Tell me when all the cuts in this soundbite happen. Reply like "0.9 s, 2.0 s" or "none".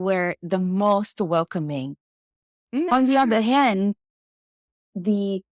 2.9 s